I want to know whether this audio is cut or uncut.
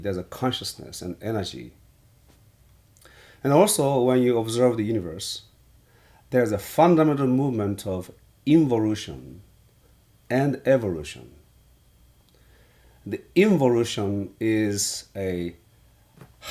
uncut